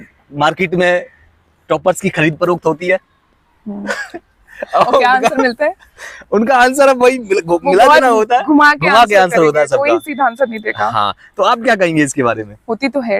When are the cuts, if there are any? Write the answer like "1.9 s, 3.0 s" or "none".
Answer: none